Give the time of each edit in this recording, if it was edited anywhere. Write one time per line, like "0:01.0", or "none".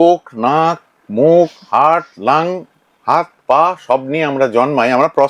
none